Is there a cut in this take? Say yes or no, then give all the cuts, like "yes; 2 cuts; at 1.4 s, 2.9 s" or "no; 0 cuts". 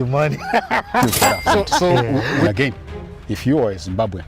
yes; 1 cut; at 2.5 s